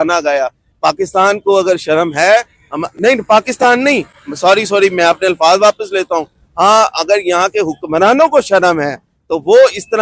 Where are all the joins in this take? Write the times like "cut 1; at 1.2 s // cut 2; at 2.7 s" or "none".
none